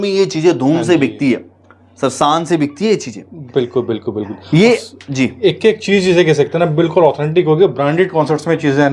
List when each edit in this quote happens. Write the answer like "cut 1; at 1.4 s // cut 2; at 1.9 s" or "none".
none